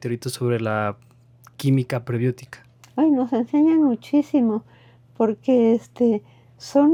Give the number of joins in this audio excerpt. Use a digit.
0